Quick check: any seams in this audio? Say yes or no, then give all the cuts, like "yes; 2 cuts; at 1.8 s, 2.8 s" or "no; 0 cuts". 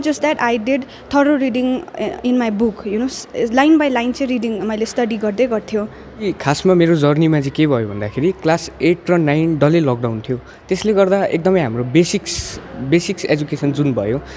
yes; 1 cut; at 6.2 s